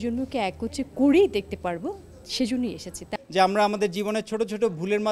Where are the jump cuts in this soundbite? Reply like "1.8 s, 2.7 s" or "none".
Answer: 3.1 s